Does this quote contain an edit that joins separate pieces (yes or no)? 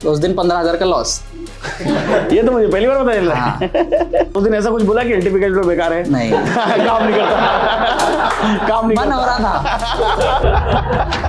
yes